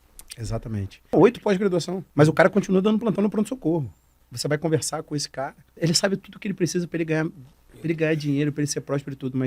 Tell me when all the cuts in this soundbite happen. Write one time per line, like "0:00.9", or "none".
0:01.1
0:02.0
0:04.3
0:05.7